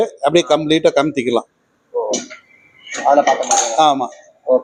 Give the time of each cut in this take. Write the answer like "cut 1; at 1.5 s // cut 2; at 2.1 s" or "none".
none